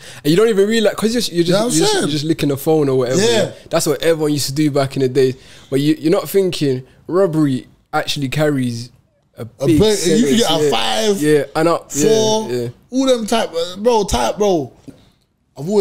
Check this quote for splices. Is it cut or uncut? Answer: cut